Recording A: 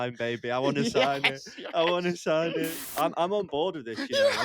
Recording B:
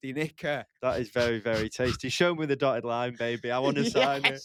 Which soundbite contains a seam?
A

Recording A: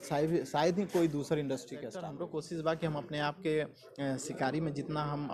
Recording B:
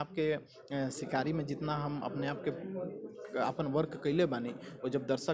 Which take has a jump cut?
A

